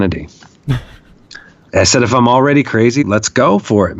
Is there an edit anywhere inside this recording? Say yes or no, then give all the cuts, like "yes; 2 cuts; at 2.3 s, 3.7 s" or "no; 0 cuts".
yes; 2 cuts; at 1.7 s, 3.0 s